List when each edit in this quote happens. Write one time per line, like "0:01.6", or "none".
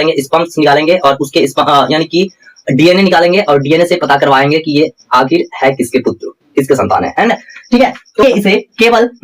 0:08.2